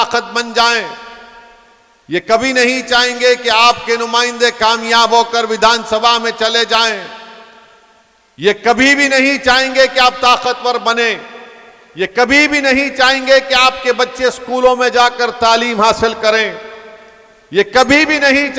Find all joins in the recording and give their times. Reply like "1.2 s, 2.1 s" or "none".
none